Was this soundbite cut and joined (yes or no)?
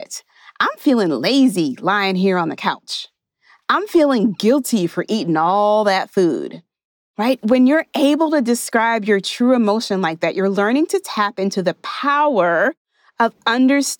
no